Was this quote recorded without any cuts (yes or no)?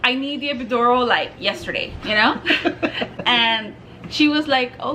yes